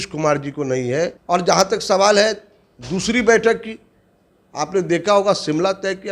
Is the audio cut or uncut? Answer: cut